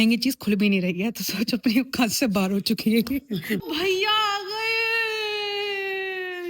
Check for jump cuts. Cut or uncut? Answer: cut